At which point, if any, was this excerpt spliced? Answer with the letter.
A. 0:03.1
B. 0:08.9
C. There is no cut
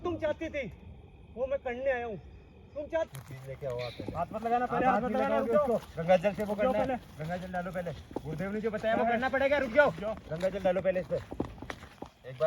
A